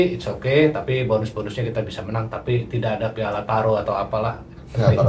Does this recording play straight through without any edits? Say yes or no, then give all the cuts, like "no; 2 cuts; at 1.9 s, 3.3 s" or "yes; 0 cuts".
yes; 0 cuts